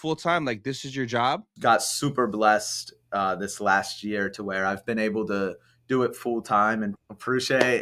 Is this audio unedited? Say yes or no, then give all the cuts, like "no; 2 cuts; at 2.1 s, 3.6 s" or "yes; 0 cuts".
no; 2 cuts; at 1.5 s, 7.0 s